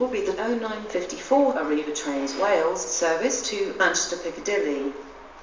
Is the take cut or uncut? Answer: uncut